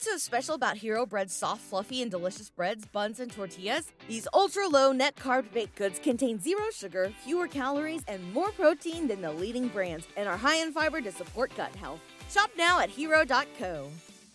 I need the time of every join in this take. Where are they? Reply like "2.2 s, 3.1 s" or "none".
none

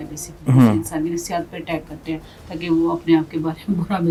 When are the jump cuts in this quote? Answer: none

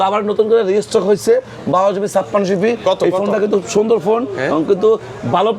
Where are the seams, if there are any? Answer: none

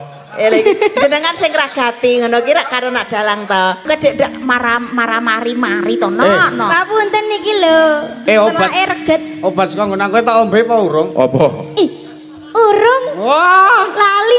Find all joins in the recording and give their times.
3.9 s

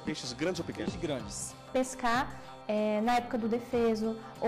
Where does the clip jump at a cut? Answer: 1.7 s

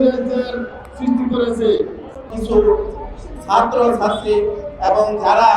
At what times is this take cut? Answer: 2.4 s

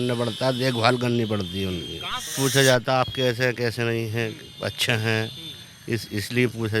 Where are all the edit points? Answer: 2.3 s

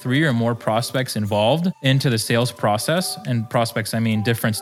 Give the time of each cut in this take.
1.8 s

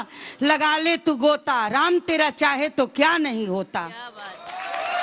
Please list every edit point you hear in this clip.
none

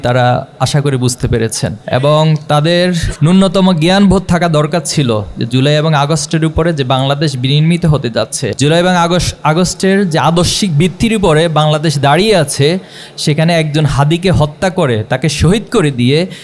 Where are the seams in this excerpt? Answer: 1.8 s, 3.1 s, 8.4 s

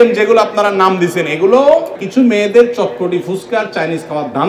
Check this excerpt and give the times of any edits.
2.0 s

